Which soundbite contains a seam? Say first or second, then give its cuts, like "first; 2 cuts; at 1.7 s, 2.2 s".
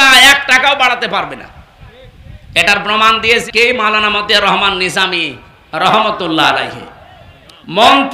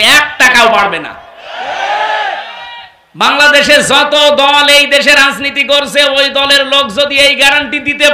first; 1 cut; at 3.5 s